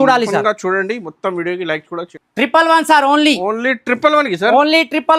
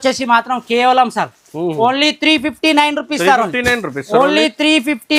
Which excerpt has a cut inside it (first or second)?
first